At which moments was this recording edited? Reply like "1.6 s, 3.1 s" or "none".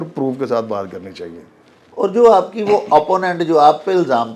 none